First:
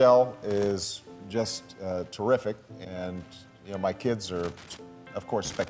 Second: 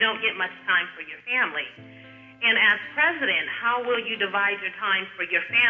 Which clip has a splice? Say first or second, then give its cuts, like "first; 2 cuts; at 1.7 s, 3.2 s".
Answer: first; 1 cut; at 2.8 s